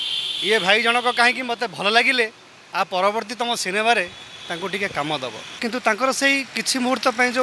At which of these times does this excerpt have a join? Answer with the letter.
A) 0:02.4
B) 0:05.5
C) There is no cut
B